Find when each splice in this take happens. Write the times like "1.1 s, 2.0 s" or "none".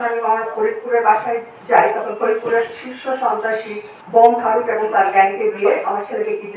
none